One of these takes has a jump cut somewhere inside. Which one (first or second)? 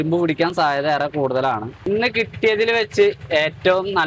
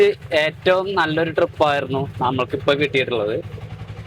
first